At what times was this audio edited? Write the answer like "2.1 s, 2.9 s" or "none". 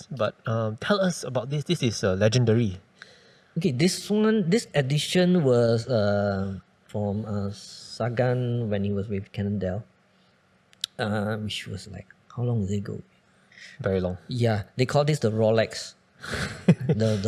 none